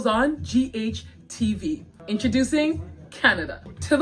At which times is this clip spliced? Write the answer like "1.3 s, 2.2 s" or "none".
1.9 s